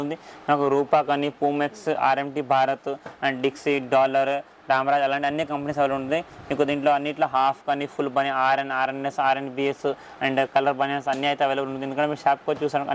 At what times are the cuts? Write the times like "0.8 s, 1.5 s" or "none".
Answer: none